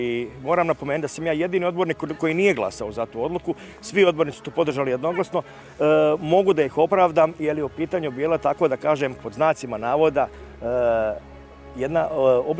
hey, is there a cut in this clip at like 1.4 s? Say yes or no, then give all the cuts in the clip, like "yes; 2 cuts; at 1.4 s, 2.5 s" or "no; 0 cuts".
no; 0 cuts